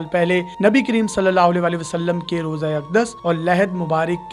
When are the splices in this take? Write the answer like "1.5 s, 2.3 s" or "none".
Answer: none